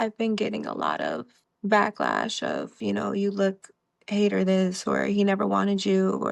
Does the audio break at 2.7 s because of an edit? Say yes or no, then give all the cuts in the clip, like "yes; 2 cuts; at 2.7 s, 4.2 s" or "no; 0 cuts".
yes; 2 cuts; at 1.3 s, 2.7 s